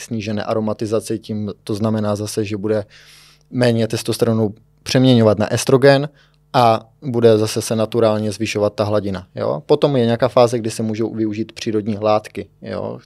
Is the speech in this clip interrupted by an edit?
no; 0 cuts

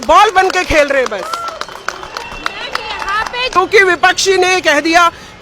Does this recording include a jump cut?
yes; 1 cut; at 3.5 s

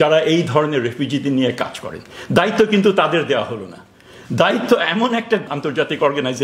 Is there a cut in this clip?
yes; 1 cut; at 5.5 s

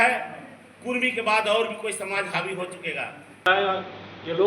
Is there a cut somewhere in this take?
yes; 1 cut; at 3.5 s

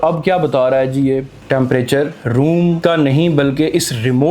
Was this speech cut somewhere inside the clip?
yes; 2 cuts; at 1.3 s, 2.8 s

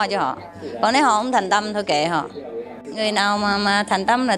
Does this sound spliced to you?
yes; 1 cut; at 2.9 s

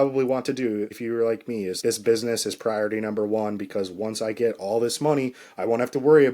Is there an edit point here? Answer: yes; 2 cuts; at 0.9 s, 1.8 s

